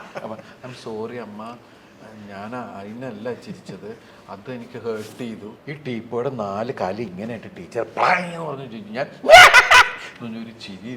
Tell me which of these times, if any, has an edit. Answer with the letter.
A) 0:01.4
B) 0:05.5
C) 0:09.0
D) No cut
B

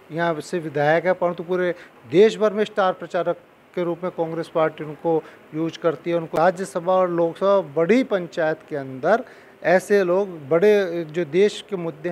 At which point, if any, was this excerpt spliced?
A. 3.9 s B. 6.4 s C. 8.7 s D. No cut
B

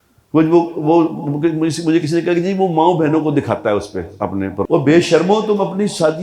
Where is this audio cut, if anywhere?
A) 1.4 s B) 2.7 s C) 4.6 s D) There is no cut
C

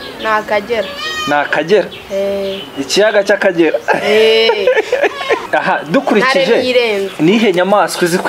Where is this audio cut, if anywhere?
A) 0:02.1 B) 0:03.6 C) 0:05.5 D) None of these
C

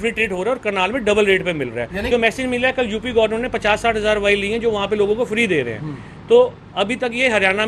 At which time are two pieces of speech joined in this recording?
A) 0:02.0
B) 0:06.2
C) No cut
A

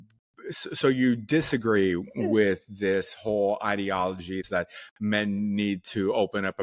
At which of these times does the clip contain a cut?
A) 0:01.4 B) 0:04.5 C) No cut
B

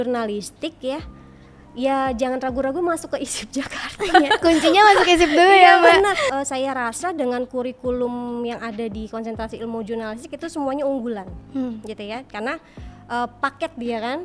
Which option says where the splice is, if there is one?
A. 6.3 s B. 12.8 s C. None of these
A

